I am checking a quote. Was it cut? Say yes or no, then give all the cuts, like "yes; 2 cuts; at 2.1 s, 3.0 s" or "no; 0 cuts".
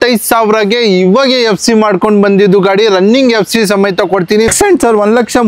yes; 1 cut; at 4.5 s